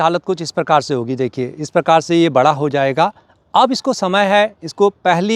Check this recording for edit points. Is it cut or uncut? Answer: uncut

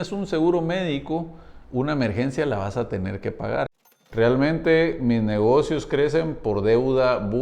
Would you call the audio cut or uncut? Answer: cut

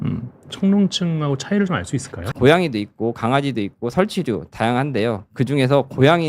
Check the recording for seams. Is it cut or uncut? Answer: cut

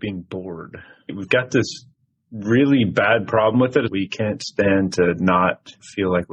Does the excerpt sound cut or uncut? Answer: cut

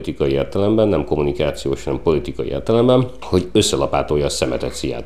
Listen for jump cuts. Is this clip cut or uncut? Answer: uncut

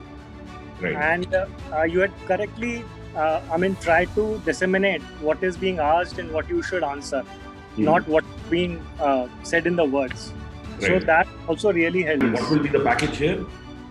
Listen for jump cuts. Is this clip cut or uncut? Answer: cut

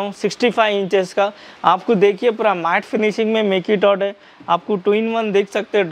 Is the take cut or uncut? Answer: uncut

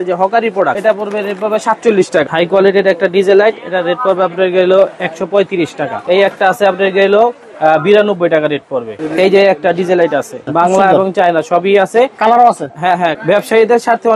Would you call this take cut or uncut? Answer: cut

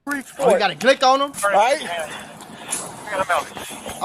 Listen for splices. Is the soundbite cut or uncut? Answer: uncut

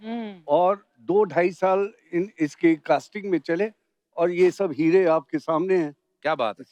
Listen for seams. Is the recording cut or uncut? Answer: uncut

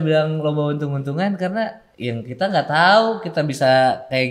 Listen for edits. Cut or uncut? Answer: cut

